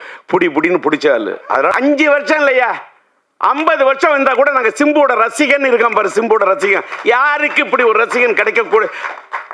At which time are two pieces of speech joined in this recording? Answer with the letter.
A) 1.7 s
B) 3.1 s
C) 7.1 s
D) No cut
A